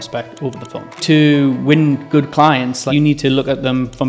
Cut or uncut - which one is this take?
cut